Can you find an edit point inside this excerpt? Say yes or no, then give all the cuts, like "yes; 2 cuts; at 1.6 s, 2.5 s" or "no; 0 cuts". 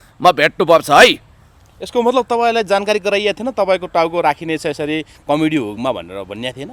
no; 0 cuts